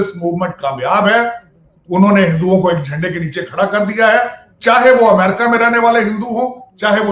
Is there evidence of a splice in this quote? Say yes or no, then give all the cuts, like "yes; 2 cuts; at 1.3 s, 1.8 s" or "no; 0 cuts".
no; 0 cuts